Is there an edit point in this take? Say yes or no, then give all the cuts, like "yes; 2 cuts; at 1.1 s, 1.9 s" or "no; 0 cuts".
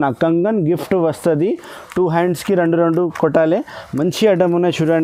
no; 0 cuts